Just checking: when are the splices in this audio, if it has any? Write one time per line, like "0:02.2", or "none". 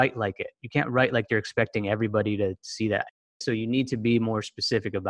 0:03.2